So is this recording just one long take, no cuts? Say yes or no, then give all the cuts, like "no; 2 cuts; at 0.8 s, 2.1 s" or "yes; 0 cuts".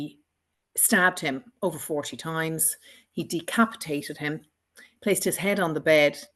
yes; 0 cuts